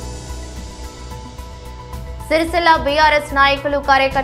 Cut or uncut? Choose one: cut